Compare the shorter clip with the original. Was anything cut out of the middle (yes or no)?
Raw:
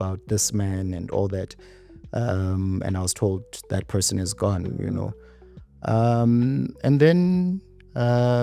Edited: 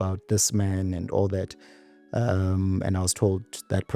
no